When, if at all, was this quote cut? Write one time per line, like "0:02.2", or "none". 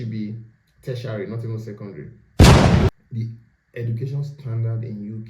0:02.2
0:02.9